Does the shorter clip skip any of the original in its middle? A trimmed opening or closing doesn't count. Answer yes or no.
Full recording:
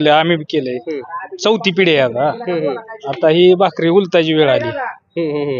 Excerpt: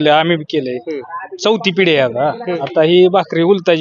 yes